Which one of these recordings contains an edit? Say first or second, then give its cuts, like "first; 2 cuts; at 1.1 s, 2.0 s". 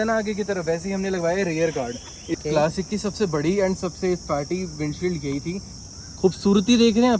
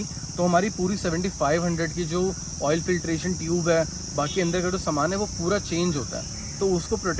first; 2 cuts; at 2.4 s, 5.7 s